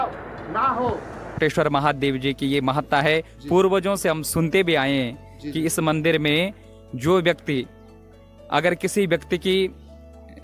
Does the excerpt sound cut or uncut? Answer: cut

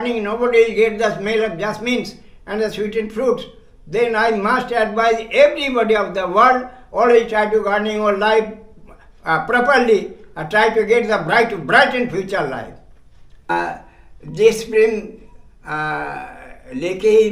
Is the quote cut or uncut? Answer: cut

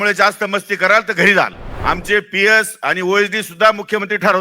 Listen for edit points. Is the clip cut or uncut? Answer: cut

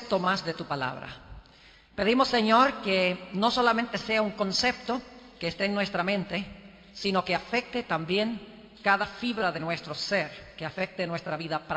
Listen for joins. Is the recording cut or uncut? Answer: cut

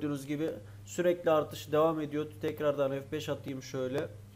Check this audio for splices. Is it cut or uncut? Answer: uncut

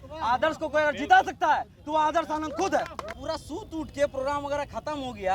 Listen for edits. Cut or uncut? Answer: cut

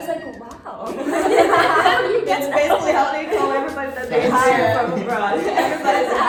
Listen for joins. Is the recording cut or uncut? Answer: uncut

